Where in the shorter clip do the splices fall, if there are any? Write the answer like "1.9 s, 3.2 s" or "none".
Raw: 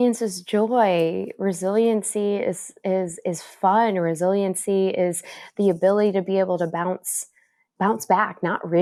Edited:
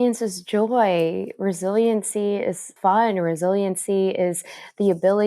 2.7 s